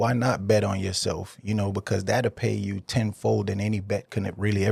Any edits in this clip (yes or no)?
no